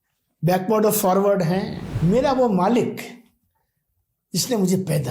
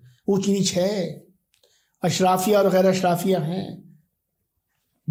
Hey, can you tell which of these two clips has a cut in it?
first; 1 cut; at 1.8 s

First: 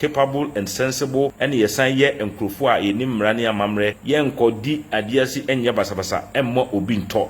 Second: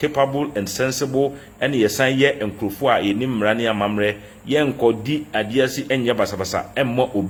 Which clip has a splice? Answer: first; 2 cuts; at 1.3 s, 4.0 s

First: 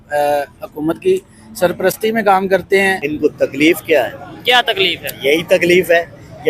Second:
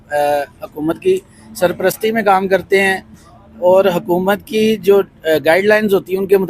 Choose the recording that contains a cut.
first; 1 cut; at 3.0 s

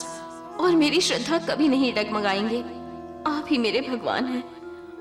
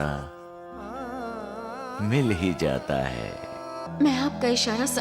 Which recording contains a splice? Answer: second; 1 cut; at 3.8 s

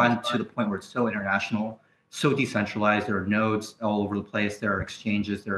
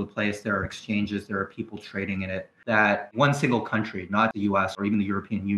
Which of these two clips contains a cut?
second; 2 cuts; at 3.0 s, 4.5 s

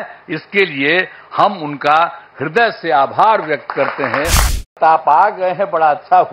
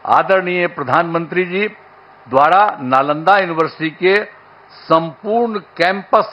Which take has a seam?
first; 1 cut; at 4.7 s

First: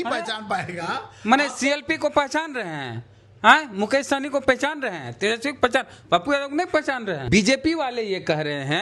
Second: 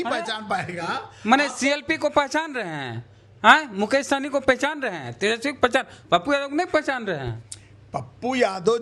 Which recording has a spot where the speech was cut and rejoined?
first; 1 cut; at 7.2 s

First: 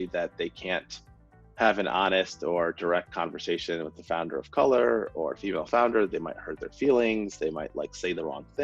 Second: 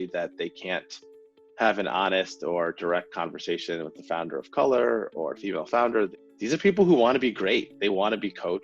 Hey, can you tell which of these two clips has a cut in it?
second; 2 cuts; at 6.2 s, 7.7 s

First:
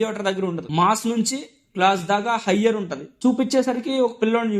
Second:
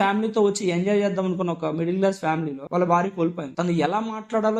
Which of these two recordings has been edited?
first; 1 cut; at 3.1 s

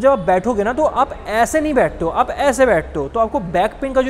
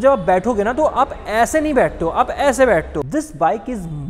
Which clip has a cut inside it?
second; 1 cut; at 3.0 s

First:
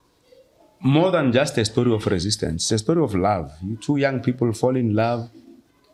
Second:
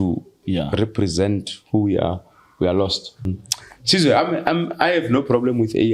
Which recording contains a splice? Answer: second; 1 cut; at 3.3 s

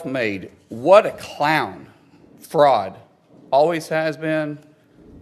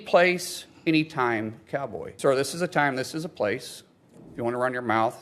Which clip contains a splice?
second; 1 cut; at 2.0 s

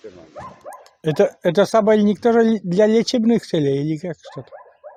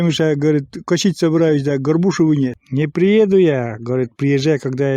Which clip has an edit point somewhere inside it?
second; 1 cut; at 2.6 s

